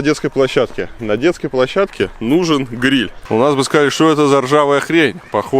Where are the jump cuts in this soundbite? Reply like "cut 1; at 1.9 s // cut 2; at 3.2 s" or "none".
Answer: cut 1; at 3.2 s